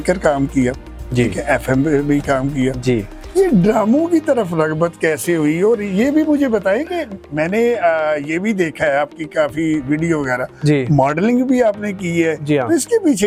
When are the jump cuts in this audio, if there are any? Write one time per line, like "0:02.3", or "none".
none